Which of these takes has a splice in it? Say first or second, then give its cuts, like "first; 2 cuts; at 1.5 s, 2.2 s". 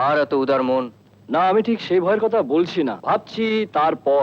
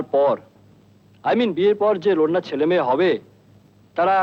first; 1 cut; at 3.0 s